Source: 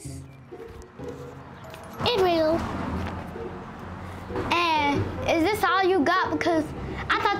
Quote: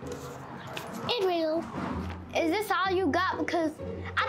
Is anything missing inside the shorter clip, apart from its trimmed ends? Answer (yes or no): yes